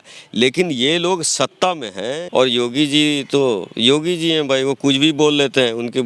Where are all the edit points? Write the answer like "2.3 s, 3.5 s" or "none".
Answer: 2.2 s